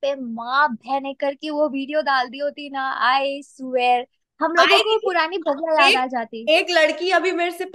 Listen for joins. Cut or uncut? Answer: uncut